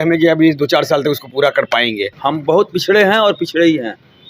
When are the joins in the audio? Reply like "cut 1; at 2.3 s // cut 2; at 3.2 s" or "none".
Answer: cut 1; at 2.1 s